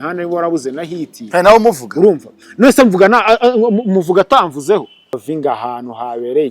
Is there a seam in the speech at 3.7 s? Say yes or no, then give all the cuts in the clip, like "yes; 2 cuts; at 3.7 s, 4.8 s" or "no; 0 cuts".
no; 1 cut; at 5.1 s